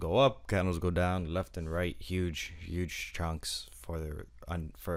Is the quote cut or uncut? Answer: uncut